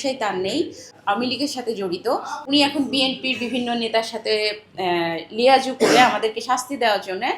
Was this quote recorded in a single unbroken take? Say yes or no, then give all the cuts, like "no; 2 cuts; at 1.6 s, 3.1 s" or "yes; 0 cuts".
no; 2 cuts; at 0.9 s, 2.3 s